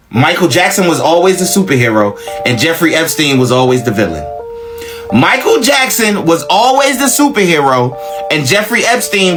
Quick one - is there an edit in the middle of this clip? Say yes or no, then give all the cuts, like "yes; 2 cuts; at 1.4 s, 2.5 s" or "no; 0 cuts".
no; 0 cuts